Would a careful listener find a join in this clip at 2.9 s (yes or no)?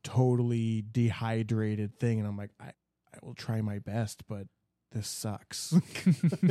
no